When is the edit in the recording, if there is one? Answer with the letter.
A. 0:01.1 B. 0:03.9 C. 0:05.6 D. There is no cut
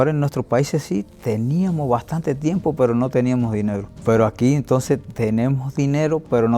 B